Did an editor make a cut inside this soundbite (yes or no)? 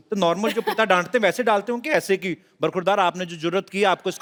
no